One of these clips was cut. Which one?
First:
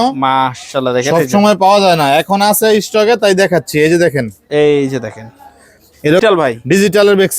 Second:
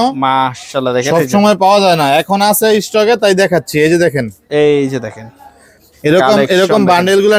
first; 1 cut; at 6.2 s

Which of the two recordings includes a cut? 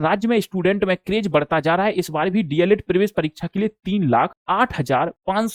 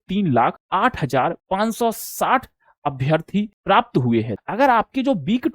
second; 1 cut; at 4.4 s

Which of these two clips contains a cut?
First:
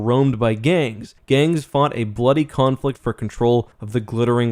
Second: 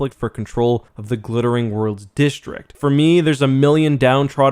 second; 1 cut; at 2.7 s

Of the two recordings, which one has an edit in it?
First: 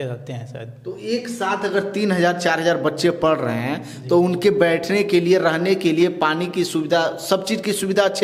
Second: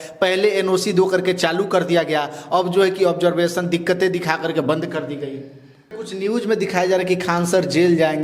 second; 1 cut; at 6.0 s

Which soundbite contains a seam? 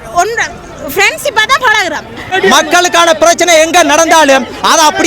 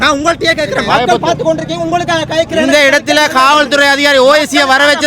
first; 1 cut; at 2.2 s

